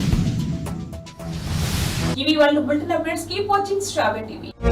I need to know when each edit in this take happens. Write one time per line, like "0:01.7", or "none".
none